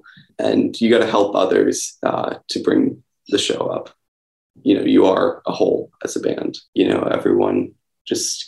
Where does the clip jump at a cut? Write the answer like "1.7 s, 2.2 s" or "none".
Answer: 6.6 s